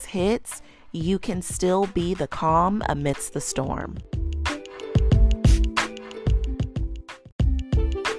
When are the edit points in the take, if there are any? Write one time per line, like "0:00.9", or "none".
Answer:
0:04.1
0:07.2